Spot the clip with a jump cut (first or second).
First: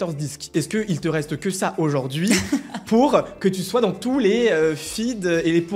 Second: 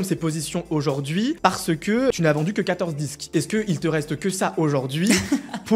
second